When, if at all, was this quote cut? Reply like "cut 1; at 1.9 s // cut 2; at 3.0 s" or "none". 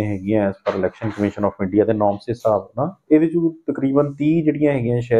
none